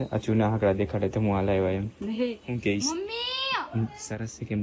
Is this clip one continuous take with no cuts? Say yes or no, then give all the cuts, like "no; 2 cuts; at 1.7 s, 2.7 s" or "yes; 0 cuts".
yes; 0 cuts